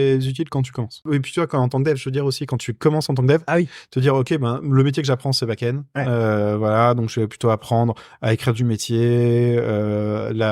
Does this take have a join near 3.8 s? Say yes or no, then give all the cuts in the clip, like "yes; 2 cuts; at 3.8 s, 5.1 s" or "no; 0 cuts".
no; 1 cut; at 1.1 s